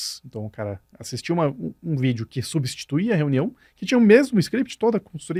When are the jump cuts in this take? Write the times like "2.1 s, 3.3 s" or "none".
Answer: none